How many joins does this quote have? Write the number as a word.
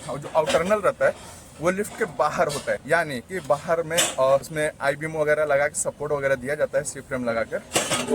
two